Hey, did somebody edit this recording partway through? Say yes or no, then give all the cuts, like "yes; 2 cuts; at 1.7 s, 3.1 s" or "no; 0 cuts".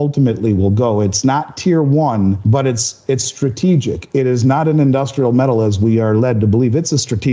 yes; 1 cut; at 2.4 s